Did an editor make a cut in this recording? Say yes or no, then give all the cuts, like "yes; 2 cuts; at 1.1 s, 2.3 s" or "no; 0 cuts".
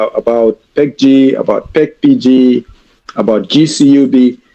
no; 0 cuts